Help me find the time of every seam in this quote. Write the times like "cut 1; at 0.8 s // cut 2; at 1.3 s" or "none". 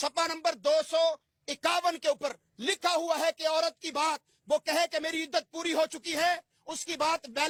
none